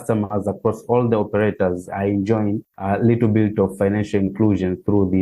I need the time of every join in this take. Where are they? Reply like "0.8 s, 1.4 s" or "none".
2.7 s